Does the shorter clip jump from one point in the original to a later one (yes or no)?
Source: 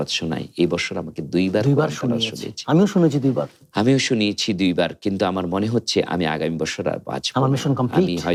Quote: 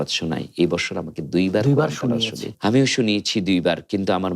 yes